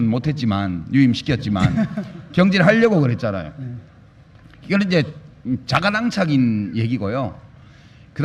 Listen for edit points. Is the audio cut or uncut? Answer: cut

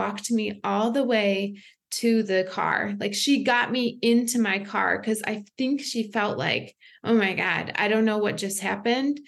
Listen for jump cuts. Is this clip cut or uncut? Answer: uncut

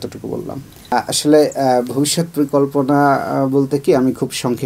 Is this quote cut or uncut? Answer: cut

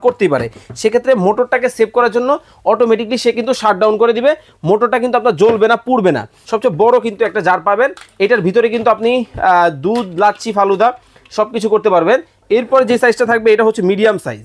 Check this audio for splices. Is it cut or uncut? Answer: cut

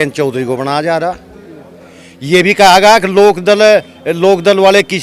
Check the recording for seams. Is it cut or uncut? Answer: uncut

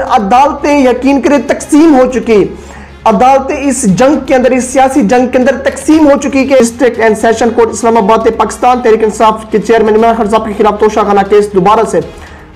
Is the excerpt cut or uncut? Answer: cut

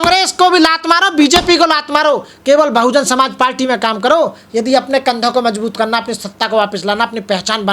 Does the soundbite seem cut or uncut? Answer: uncut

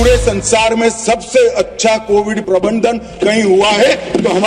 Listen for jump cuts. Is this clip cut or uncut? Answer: uncut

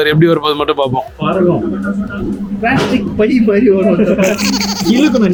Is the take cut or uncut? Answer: uncut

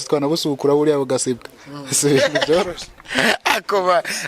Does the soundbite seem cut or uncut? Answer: uncut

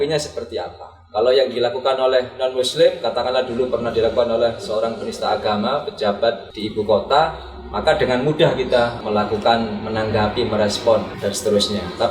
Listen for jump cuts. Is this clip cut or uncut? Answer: cut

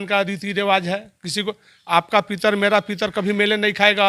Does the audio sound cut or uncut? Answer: uncut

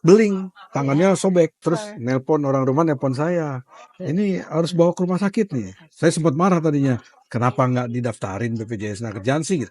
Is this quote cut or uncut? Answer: cut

